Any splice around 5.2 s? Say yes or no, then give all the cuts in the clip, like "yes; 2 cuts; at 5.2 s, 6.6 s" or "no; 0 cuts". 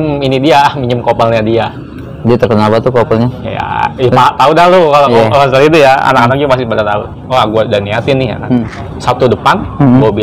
no; 2 cuts; at 7.2 s, 8.8 s